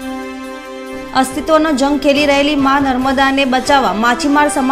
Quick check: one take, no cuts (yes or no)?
no